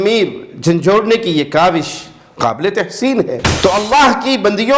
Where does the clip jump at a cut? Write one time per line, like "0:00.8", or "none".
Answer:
0:03.5